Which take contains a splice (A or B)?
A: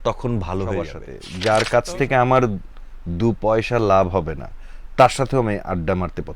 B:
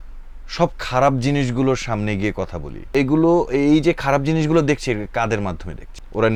A